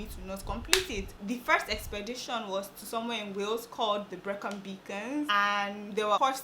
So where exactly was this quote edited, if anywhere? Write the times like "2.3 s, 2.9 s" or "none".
none